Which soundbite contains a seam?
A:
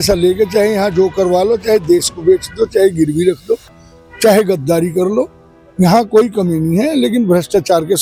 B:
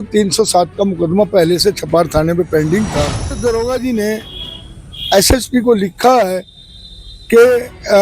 B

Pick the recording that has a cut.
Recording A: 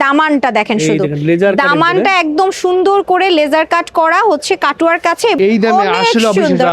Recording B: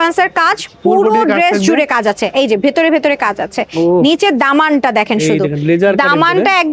A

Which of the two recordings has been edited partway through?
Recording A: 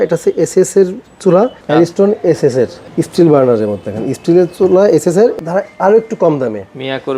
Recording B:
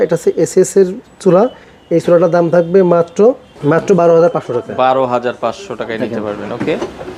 A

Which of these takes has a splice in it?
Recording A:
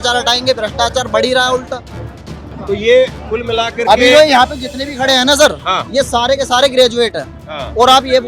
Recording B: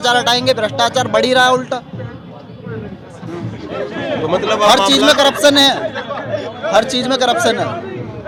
A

